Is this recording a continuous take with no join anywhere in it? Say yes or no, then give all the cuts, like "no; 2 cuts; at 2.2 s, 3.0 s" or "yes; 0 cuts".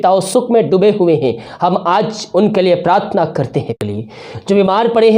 no; 1 cut; at 3.8 s